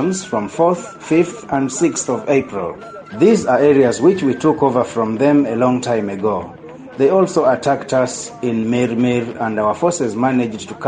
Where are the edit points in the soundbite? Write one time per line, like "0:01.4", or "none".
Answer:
none